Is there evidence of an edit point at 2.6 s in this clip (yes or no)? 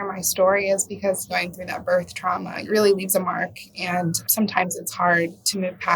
yes